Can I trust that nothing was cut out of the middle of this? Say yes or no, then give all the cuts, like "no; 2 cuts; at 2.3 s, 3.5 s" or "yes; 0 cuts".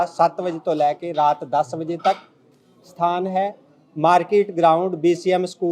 yes; 0 cuts